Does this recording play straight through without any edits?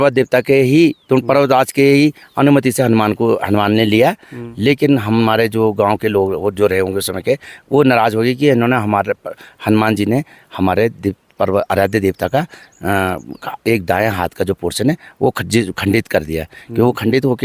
yes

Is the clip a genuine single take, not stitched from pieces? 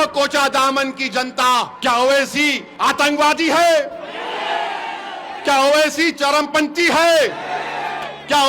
no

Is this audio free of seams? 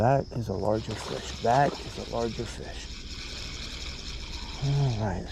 yes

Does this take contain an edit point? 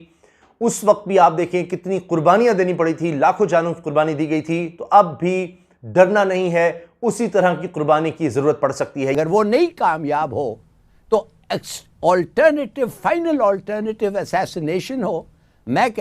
yes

